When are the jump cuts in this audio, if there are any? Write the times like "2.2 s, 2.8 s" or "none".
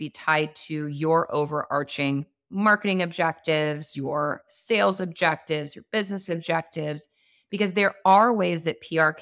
none